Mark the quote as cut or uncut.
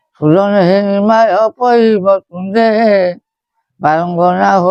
uncut